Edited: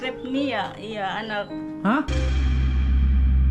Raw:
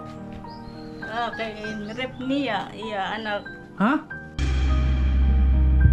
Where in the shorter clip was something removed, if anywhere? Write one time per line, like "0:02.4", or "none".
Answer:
0:02.1